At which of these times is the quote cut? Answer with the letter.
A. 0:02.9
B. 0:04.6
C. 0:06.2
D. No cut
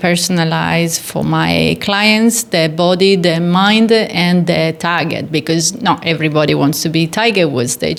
D